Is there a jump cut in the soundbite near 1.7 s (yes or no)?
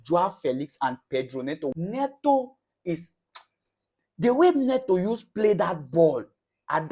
yes